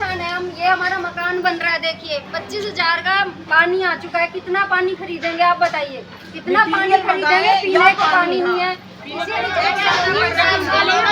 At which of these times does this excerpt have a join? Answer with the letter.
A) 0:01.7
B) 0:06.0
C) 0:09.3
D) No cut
C